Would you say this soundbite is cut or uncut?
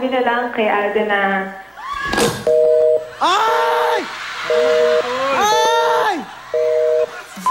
cut